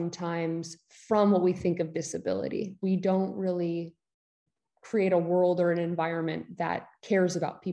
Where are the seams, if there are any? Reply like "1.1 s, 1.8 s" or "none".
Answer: 2.8 s